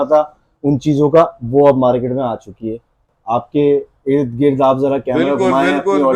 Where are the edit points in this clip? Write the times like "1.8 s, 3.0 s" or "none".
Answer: 3.1 s

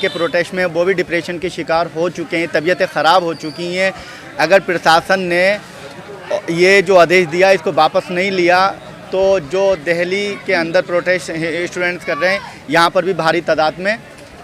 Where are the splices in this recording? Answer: none

